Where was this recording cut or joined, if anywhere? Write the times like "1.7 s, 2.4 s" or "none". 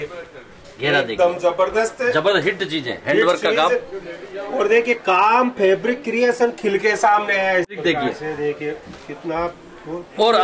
7.7 s